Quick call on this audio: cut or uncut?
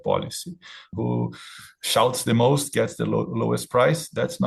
cut